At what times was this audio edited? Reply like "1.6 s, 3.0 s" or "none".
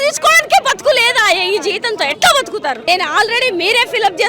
2.8 s